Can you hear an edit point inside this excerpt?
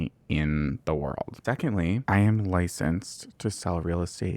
yes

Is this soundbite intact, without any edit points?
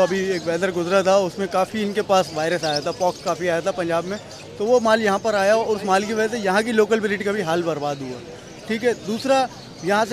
yes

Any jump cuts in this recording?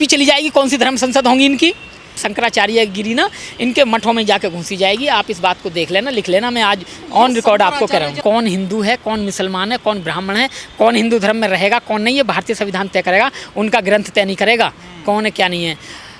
yes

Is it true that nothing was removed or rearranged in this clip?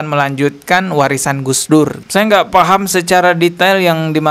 no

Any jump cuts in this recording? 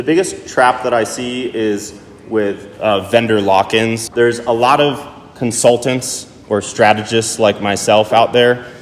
yes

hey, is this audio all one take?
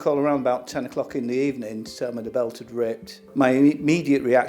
yes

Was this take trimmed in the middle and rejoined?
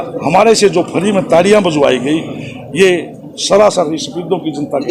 no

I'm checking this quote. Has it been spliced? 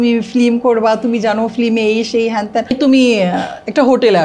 yes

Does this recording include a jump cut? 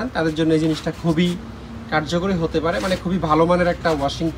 no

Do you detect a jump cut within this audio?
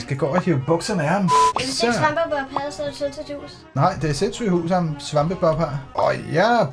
yes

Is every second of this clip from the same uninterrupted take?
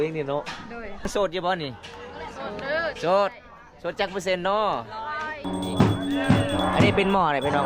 no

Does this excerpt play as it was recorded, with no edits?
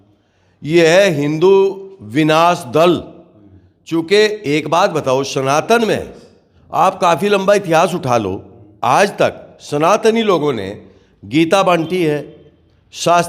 yes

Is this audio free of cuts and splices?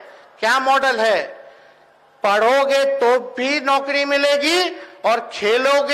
yes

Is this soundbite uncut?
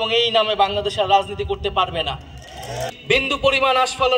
no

